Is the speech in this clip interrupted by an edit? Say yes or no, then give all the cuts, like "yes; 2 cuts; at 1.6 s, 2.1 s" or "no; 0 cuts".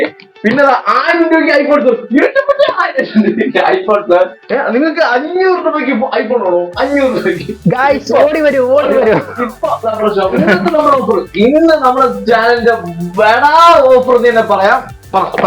yes; 2 cuts; at 4.4 s, 10.3 s